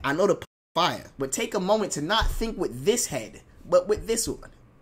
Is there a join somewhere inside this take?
no; 0 cuts

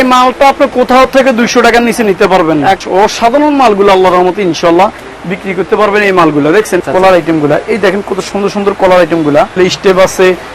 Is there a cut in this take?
yes; 3 cuts; at 2.8 s, 6.8 s, 9.5 s

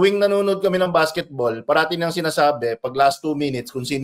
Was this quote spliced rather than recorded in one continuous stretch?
no; 0 cuts

